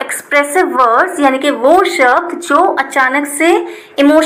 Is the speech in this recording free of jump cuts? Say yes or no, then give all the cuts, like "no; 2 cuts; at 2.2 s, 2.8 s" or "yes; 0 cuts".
yes; 0 cuts